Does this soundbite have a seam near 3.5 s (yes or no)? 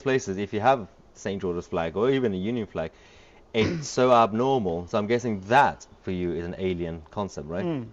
no